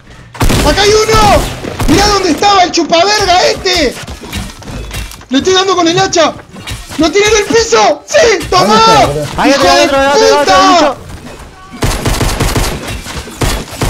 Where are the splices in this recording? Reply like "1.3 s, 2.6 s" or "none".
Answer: none

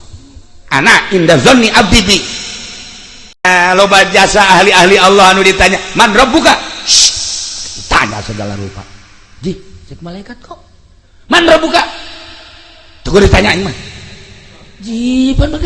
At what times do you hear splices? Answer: 3.4 s

